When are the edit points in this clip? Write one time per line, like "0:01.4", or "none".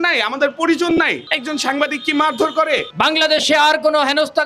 0:02.9